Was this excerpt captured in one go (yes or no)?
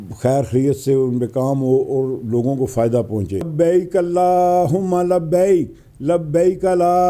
no